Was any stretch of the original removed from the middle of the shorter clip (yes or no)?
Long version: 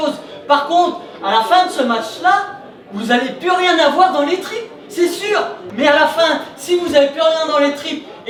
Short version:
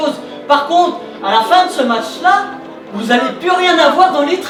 no